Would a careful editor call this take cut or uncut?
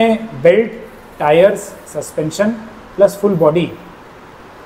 uncut